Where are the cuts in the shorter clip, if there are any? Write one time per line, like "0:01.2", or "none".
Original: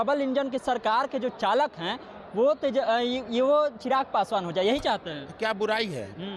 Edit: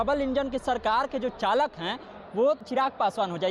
0:02.6